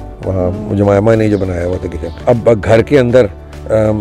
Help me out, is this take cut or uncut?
cut